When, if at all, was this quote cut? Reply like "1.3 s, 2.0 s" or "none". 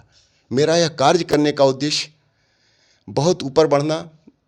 none